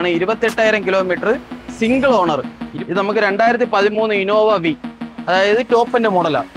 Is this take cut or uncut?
cut